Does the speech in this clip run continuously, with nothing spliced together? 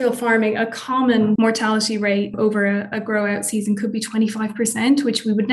no; 2 cuts; at 1.4 s, 2.4 s

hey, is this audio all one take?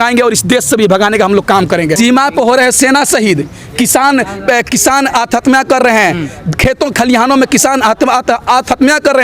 no; 1 cut; at 1.9 s

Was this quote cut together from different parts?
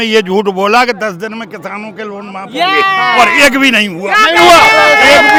no; 0 cuts

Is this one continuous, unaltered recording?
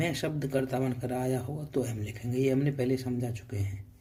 yes; 0 cuts

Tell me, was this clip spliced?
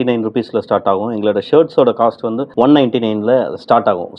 no; 0 cuts

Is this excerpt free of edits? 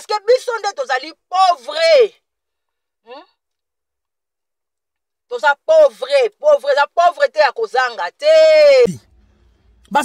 no; 1 cut; at 8.9 s

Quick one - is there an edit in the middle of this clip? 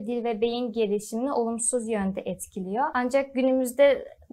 yes; 1 cut; at 2.9 s

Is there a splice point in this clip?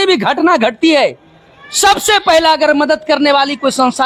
no; 0 cuts

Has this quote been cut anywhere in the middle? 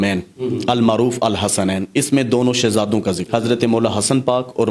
no; 0 cuts

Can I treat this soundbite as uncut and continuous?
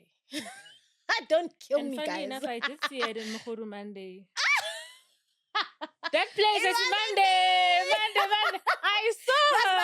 yes; 0 cuts

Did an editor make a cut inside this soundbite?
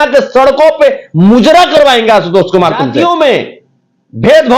yes; 1 cut; at 2.9 s

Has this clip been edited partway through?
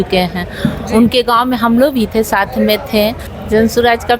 yes; 1 cut; at 3.3 s

